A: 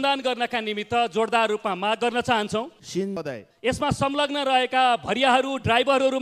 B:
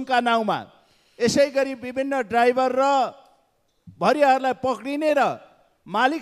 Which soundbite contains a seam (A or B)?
A